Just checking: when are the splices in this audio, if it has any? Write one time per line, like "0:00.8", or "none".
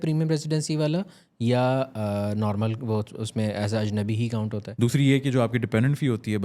0:04.6